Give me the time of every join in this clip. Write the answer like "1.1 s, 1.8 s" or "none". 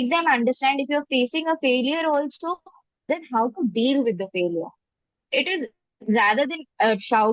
none